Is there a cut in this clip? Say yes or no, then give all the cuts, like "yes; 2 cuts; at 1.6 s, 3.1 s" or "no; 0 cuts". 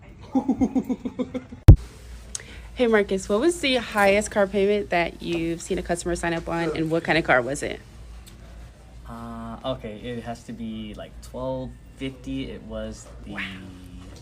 no; 0 cuts